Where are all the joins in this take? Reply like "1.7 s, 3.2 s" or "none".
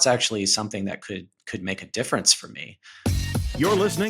2.8 s